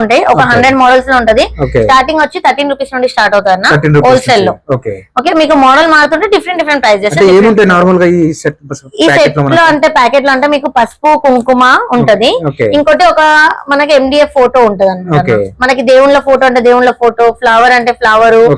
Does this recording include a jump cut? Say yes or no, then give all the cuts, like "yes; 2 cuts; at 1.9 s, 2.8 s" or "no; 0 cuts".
no; 0 cuts